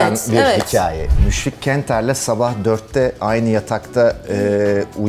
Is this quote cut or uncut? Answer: cut